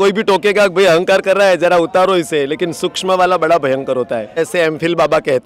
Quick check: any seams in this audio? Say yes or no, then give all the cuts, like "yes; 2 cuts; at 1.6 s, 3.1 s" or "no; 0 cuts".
yes; 1 cut; at 4.4 s